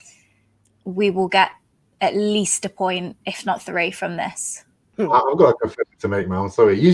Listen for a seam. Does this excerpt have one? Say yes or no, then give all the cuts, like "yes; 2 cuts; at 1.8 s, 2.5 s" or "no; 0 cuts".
yes; 1 cut; at 4.8 s